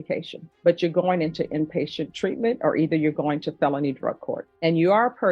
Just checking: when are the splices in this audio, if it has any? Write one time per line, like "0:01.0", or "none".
0:04.4